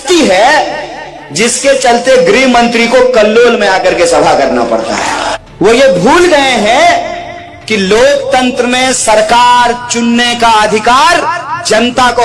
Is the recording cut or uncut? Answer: cut